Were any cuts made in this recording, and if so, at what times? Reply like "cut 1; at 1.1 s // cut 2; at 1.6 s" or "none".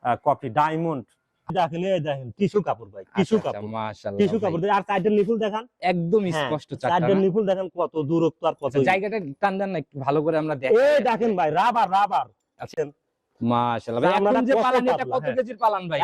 cut 1; at 1.5 s